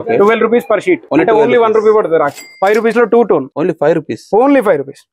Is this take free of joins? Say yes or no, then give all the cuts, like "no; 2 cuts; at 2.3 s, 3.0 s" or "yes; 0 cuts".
no; 3 cuts; at 1.0 s, 2.4 s, 3.5 s